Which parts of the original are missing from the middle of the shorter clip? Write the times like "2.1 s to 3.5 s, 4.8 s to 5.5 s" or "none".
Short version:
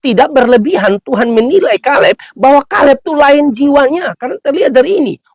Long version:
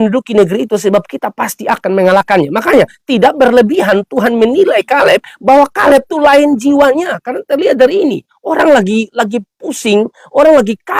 none